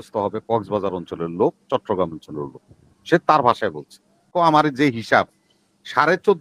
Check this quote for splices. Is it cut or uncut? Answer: cut